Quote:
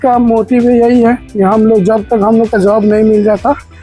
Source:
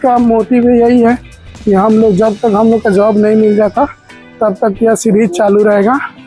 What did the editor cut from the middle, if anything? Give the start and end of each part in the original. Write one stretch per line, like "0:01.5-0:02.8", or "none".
0:01.3-0:01.6